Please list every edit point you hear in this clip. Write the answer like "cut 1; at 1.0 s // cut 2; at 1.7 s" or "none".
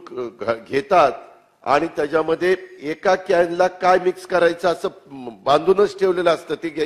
none